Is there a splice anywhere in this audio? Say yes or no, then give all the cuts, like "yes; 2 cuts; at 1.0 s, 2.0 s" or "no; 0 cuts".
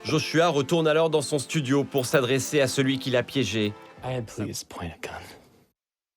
yes; 1 cut; at 3.9 s